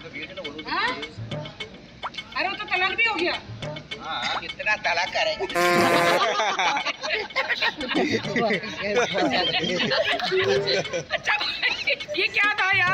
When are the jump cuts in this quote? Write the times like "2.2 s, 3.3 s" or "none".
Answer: 12.0 s